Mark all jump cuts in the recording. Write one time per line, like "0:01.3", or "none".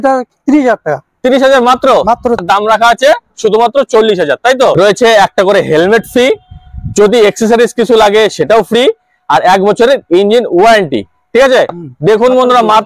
0:02.4
0:04.7
0:11.8